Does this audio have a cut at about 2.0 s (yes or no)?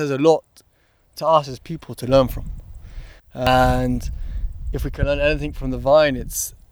no